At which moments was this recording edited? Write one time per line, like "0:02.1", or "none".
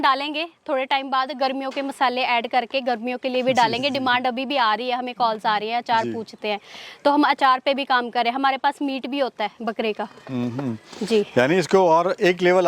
none